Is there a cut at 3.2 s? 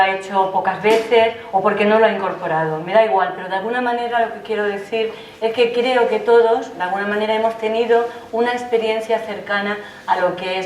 yes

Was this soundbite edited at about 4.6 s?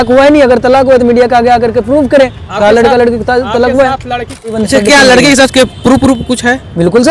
yes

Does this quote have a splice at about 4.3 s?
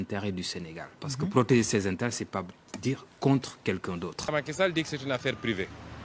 yes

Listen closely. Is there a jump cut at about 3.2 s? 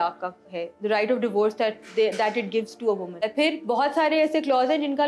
yes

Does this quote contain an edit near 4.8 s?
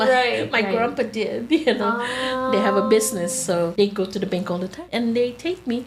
yes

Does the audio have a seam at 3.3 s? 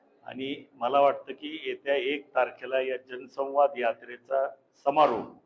no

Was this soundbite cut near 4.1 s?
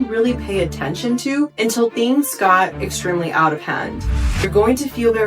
yes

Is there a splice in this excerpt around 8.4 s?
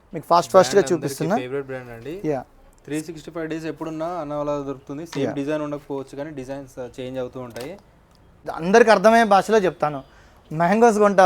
yes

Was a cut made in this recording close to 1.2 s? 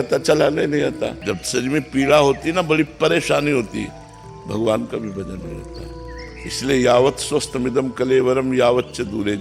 yes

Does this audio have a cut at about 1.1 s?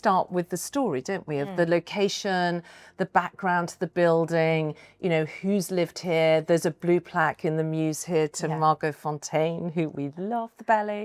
no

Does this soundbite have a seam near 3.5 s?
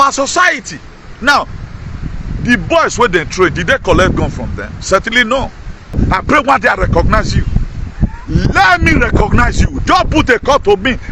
no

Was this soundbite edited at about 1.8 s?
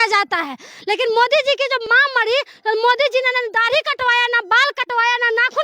yes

